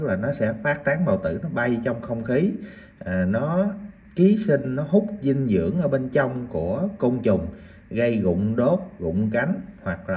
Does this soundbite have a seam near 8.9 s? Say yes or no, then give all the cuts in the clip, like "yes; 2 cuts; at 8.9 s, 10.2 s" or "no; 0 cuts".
no; 0 cuts